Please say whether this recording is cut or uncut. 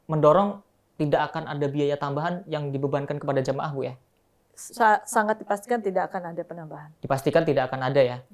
uncut